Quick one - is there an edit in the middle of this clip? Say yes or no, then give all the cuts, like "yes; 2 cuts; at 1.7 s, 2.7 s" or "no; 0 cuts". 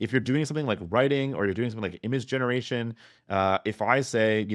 no; 0 cuts